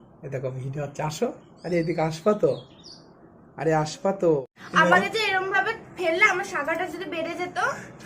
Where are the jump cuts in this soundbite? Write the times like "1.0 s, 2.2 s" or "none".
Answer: 4.6 s